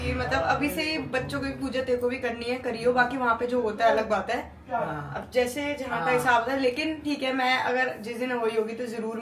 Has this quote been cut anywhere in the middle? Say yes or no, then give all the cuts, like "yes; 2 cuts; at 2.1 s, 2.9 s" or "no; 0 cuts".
no; 0 cuts